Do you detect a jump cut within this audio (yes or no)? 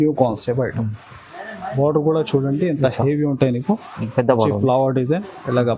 no